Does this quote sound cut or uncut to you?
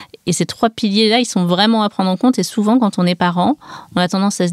uncut